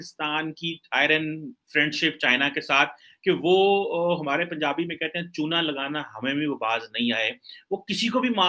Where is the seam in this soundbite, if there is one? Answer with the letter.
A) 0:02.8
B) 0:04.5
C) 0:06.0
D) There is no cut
D